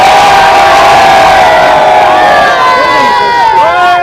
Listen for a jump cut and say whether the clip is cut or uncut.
uncut